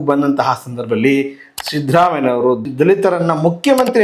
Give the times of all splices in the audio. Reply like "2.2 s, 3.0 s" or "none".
2.6 s